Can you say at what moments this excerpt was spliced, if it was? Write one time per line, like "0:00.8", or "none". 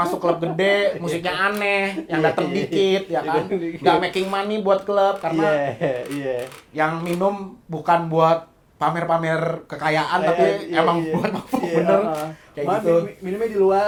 none